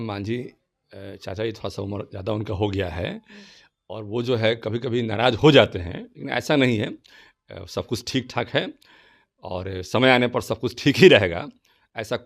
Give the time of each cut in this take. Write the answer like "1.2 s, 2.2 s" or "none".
none